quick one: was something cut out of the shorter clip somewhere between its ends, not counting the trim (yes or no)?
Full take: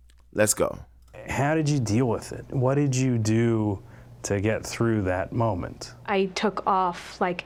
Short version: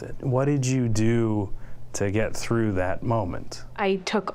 no